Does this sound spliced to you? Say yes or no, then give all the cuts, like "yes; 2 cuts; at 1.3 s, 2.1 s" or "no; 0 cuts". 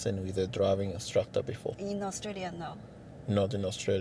yes; 1 cut; at 1.8 s